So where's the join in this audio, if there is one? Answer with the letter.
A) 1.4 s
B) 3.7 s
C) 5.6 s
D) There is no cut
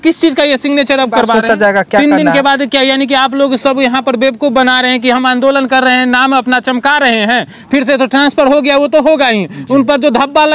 A